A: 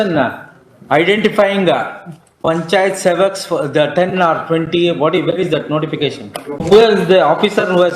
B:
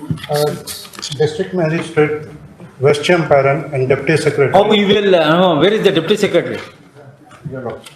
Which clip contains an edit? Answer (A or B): A